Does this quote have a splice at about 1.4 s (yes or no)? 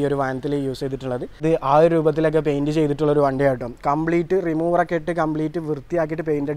yes